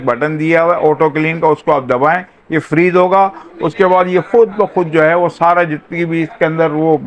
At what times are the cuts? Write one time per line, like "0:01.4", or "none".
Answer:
none